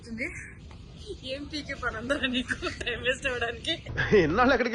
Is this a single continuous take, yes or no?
yes